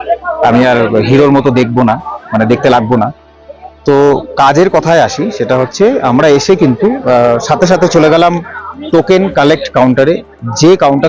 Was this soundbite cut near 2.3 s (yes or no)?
no